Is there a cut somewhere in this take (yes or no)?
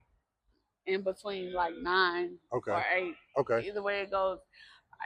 no